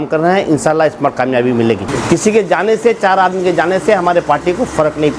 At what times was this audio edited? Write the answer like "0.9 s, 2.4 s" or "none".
1.9 s